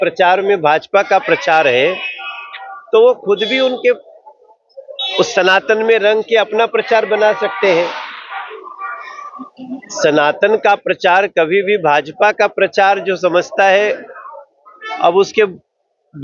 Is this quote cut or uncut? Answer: uncut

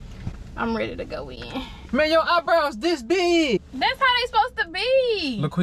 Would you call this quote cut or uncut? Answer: cut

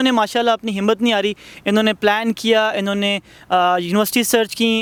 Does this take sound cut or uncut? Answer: uncut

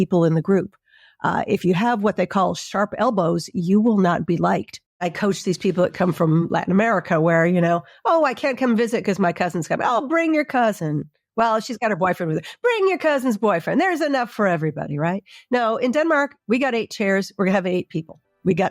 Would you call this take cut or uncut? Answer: cut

